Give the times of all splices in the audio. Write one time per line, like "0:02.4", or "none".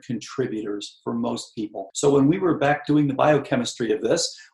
0:01.8